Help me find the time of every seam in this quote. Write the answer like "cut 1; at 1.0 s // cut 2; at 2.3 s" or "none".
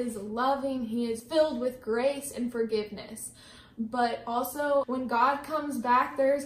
cut 1; at 1.2 s // cut 2; at 4.9 s